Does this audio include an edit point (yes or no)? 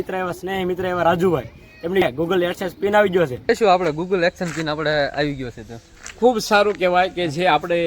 yes